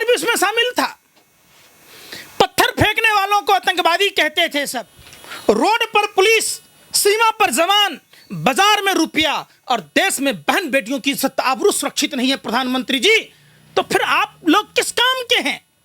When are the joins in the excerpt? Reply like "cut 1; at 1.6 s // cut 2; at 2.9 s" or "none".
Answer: none